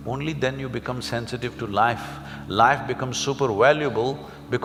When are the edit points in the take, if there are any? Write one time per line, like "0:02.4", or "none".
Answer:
none